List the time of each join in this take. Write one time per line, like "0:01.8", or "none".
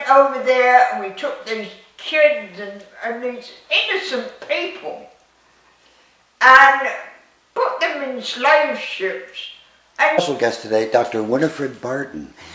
none

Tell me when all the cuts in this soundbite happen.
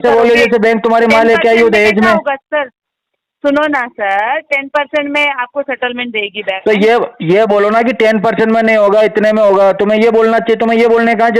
none

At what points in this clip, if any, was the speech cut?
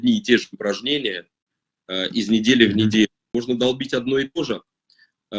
0:03.3

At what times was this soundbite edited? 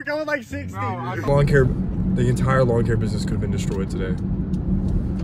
0:01.3

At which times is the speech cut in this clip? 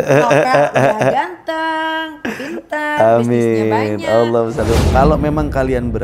0:04.8

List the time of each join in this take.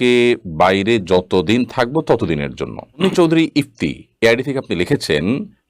0:03.0

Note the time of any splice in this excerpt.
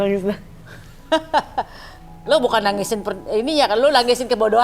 none

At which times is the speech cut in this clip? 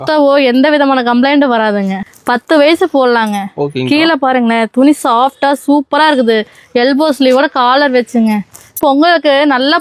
0:02.0
0:08.7

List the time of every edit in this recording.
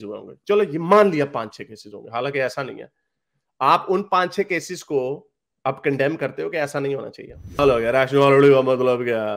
0:07.6

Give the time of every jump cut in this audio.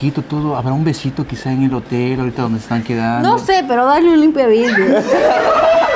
none

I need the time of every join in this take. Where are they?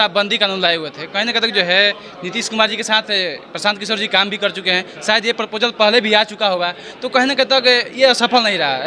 none

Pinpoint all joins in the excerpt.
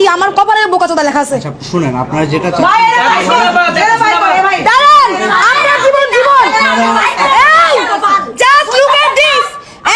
none

